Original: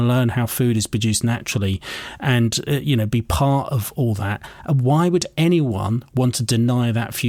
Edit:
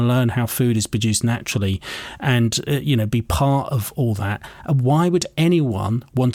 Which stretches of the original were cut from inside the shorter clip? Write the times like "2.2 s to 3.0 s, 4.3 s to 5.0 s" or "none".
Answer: none